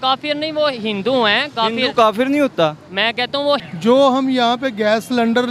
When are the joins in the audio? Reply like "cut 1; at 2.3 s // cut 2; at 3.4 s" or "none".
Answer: cut 1; at 3.7 s